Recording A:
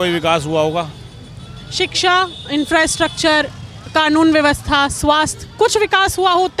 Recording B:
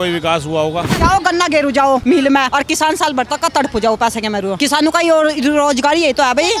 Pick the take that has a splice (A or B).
B